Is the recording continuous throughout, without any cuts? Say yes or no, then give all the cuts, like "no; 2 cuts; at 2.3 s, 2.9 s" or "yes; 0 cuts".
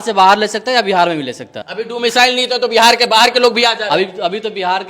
no; 1 cut; at 1.6 s